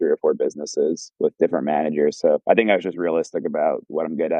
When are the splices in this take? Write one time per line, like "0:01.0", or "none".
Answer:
0:01.1
0:02.4